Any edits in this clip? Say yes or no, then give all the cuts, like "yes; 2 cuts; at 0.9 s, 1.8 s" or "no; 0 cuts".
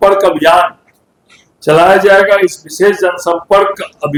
no; 0 cuts